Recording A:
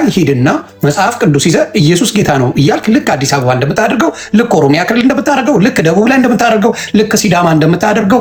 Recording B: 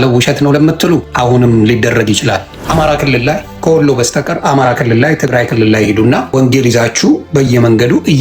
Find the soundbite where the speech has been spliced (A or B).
B